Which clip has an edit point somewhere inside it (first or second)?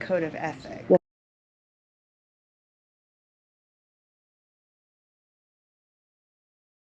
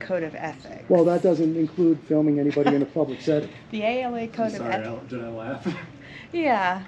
second